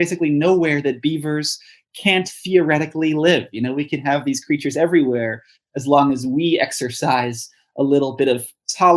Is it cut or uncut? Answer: uncut